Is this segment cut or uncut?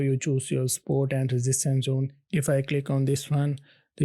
cut